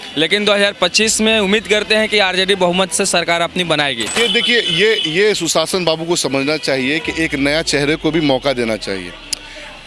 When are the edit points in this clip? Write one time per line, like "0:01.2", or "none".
0:04.1